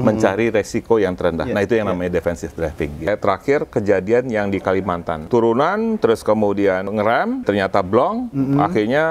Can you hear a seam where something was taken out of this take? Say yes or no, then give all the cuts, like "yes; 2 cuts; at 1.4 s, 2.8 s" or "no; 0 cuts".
yes; 3 cuts; at 3.1 s, 5.3 s, 7.4 s